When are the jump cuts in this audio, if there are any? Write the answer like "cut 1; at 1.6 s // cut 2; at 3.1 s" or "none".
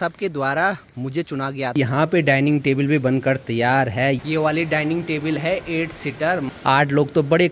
cut 1; at 1.8 s // cut 2; at 4.2 s // cut 3; at 6.5 s